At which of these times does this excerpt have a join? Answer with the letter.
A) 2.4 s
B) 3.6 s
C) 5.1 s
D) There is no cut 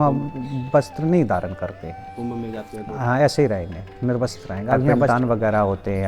C